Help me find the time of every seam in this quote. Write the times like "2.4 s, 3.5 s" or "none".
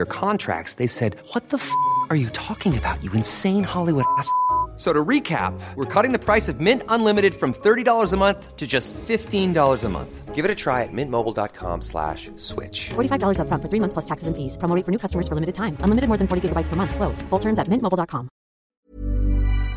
18.7 s